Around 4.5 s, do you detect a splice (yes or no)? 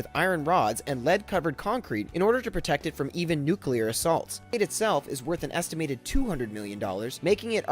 yes